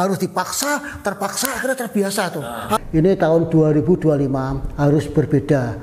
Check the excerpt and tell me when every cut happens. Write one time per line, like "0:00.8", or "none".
0:02.8

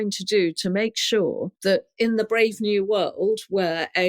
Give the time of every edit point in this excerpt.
0:01.9

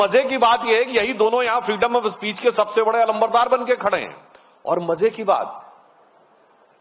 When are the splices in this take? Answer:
none

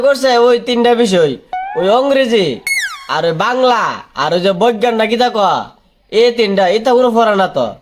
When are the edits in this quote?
none

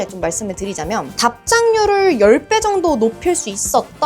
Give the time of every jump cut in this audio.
0:01.1

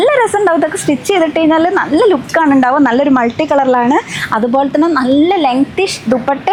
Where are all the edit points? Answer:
none

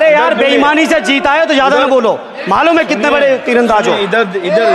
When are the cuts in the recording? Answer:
none

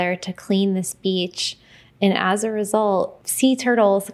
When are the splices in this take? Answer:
0:03.2

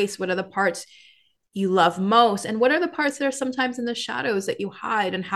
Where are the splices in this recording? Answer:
none

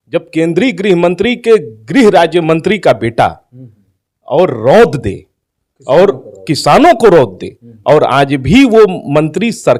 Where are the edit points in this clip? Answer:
none

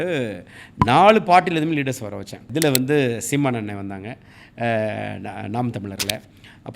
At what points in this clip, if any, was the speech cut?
0:02.4

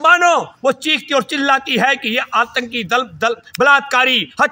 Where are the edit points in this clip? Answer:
none

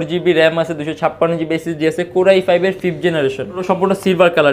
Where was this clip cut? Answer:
0:03.6

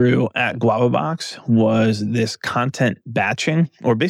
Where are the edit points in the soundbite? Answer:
none

